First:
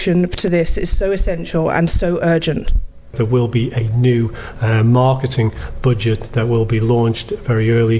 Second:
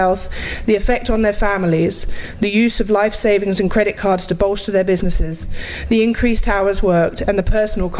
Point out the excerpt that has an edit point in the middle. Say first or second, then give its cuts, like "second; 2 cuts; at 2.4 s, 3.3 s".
first; 1 cut; at 3.1 s